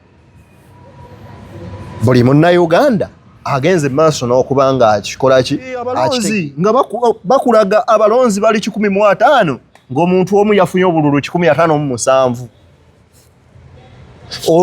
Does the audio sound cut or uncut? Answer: cut